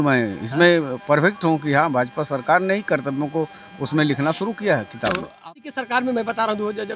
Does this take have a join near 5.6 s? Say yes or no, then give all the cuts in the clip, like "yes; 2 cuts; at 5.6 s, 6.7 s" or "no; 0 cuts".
yes; 1 cut; at 5.6 s